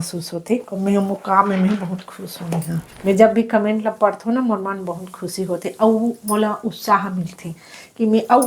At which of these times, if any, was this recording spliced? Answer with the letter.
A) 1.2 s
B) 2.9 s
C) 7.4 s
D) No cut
B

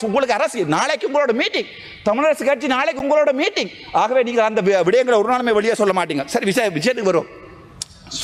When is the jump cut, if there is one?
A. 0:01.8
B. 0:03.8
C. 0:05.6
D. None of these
D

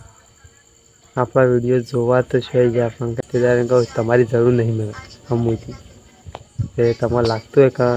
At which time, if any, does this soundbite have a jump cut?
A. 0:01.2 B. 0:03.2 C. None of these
B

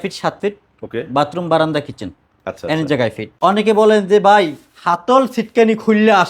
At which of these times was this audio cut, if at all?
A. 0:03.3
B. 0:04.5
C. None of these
A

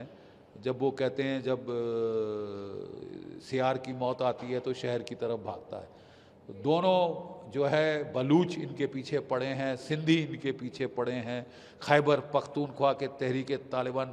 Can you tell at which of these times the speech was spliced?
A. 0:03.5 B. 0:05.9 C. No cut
C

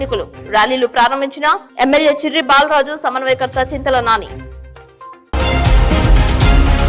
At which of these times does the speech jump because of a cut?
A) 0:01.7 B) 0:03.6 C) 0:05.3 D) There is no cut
C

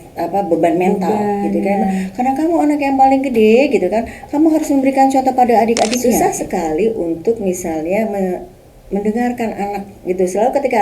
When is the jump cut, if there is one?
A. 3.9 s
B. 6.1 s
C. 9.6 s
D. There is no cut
B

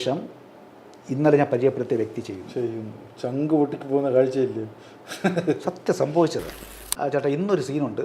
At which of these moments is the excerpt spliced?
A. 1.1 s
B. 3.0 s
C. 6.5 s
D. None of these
C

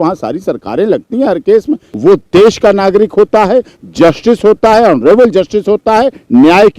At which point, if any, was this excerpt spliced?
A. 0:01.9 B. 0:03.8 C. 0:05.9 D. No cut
A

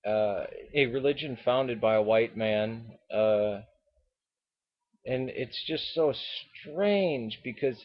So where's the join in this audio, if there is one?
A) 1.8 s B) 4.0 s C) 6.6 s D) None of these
A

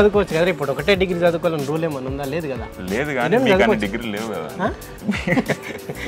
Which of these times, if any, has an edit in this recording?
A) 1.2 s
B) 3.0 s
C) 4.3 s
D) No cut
D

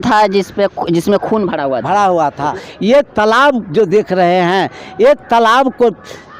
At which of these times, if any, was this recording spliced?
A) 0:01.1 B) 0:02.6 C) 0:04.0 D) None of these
B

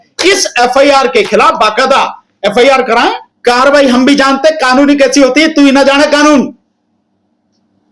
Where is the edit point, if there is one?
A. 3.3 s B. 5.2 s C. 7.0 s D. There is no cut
A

